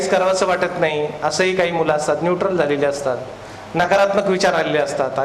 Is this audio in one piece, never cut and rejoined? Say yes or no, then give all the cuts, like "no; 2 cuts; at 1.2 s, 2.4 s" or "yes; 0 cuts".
yes; 0 cuts